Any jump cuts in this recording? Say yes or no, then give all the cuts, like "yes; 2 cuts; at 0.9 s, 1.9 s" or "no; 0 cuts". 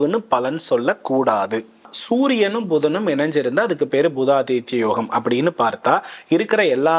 yes; 1 cut; at 2.0 s